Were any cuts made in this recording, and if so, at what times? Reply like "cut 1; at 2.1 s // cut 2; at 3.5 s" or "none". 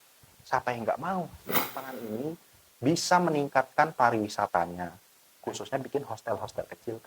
cut 1; at 1.4 s